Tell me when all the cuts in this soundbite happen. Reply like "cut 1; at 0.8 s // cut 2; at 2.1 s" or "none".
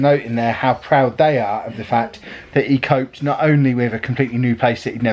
none